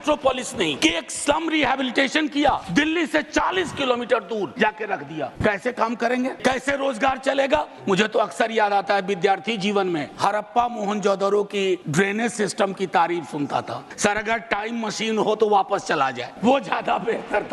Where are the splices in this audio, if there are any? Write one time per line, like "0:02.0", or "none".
0:00.8
0:02.6
0:04.9
0:06.4
0:07.7
0:10.1
0:11.9
0:13.8
0:16.3